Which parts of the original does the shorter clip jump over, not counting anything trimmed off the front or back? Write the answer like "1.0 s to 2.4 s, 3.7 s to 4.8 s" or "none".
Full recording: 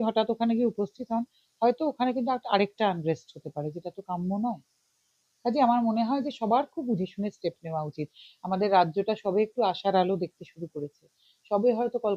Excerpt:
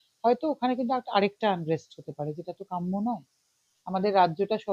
5.1 s to 8.3 s